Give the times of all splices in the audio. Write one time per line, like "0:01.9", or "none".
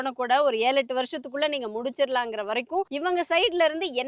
0:02.9